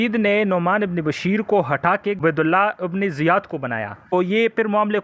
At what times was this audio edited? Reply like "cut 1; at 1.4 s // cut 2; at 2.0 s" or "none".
cut 1; at 2.2 s // cut 2; at 4.1 s